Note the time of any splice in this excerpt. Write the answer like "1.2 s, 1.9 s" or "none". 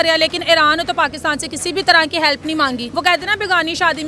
2.9 s

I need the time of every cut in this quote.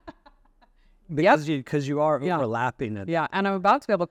none

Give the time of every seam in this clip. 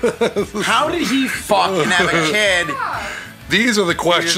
3.4 s

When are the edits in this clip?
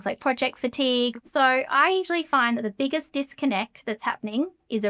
1.2 s

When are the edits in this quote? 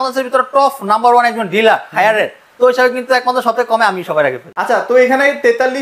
none

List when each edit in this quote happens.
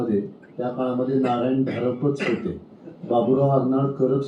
none

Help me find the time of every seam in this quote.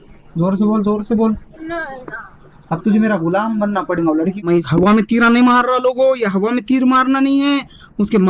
4.4 s

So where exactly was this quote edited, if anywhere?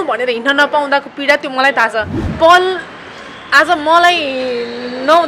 2.2 s

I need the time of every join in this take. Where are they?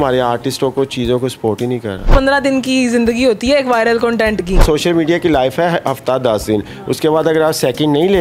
2.1 s, 4.6 s

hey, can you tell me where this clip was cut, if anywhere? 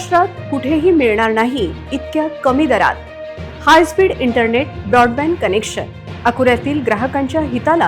none

